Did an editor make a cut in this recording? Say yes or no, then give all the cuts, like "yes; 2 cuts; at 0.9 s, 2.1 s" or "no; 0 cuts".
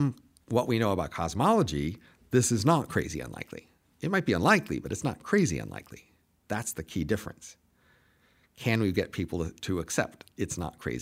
no; 0 cuts